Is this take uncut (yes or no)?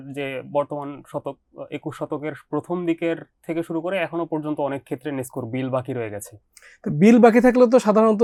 yes